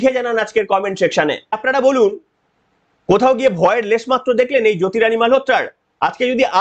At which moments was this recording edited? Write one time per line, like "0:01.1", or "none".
0:01.6